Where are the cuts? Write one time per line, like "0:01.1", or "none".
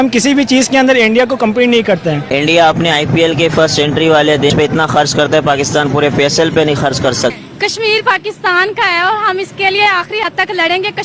0:02.3
0:04.5
0:07.3